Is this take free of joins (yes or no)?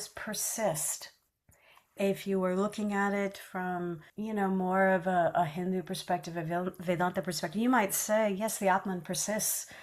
no